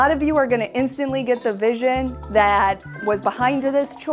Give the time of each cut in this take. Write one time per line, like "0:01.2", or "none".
none